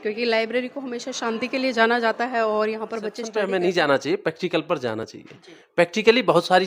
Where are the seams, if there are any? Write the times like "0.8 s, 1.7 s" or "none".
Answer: 3.2 s